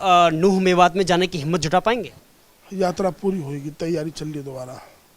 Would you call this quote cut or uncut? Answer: cut